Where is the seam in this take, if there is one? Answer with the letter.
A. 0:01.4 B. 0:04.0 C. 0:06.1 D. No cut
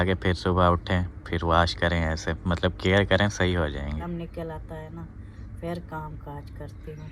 B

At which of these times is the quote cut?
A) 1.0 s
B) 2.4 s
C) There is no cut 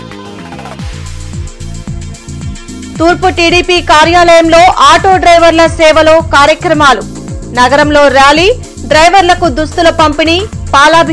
A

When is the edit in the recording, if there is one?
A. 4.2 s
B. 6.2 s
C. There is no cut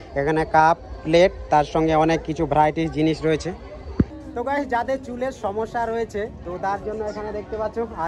A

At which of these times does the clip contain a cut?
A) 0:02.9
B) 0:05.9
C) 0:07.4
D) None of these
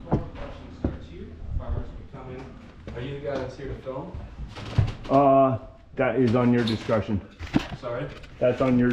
D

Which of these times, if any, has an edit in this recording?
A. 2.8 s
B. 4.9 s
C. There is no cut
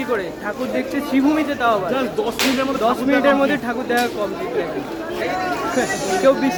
C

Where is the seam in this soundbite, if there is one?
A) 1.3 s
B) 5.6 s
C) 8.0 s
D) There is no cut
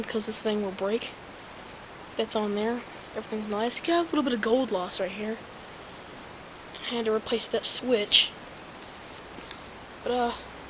D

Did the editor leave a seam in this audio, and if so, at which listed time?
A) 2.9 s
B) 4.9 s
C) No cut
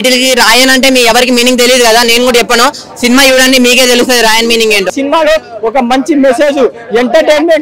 B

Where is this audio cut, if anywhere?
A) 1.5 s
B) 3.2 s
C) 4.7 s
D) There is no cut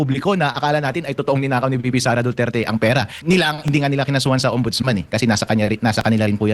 B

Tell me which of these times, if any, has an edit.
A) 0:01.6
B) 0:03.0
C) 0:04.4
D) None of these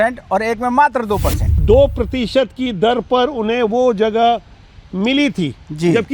A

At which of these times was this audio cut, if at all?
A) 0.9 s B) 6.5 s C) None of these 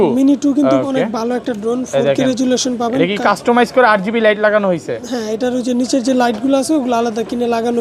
C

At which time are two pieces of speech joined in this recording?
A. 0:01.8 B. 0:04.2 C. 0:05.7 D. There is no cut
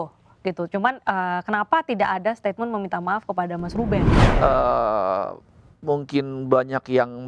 B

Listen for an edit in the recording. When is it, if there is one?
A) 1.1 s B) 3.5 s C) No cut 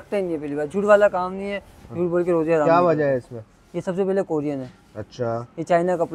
C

